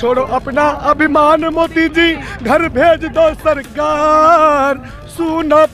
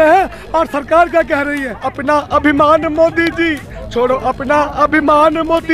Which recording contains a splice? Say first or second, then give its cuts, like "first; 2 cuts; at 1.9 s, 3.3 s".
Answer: second; 1 cut; at 1.8 s